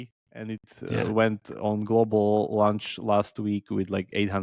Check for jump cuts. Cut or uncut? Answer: uncut